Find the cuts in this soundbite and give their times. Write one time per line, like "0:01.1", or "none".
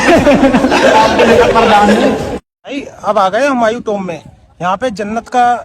0:02.9